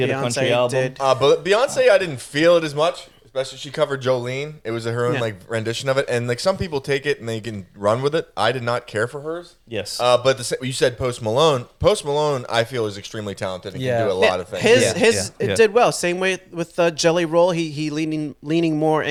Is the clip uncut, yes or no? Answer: yes